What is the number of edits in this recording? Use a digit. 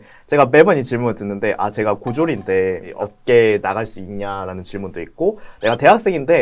1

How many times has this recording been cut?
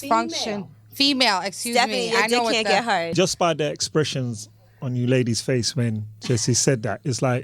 1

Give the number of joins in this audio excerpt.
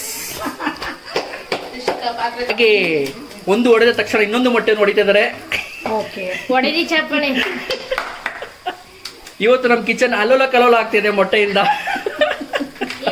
0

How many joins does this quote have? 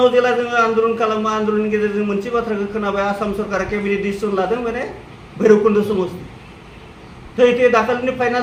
0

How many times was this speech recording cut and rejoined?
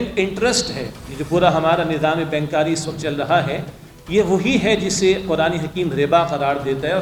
0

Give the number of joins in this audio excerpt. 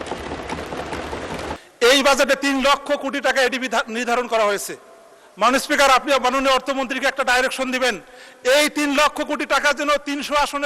1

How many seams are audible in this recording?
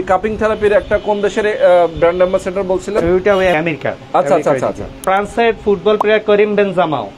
2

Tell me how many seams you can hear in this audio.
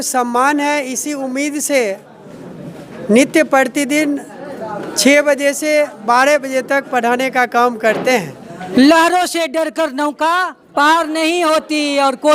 1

